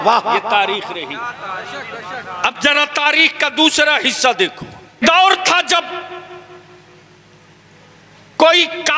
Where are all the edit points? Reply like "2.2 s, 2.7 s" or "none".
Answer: 5.0 s